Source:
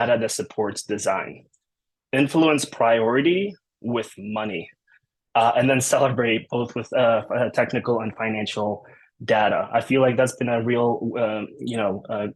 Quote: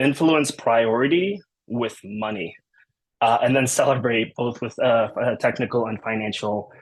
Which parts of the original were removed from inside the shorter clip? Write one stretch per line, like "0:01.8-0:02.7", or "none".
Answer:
none